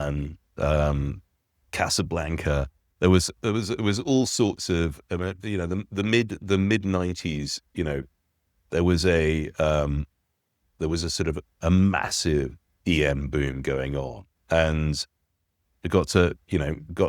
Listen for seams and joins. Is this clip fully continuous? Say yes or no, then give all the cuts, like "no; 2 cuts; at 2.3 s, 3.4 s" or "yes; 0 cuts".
yes; 0 cuts